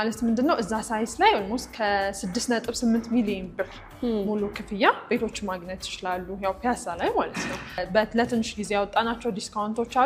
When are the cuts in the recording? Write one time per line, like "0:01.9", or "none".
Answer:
0:07.8